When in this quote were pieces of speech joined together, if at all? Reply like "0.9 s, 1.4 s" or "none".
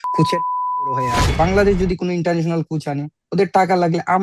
1.2 s